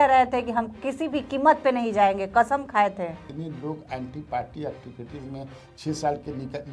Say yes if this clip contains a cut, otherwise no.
yes